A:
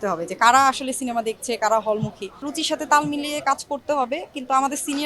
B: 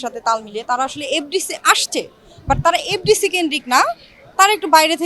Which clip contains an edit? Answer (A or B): A